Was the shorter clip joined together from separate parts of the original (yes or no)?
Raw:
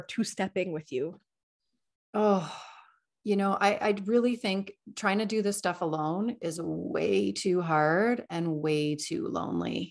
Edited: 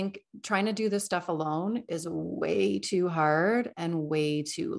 no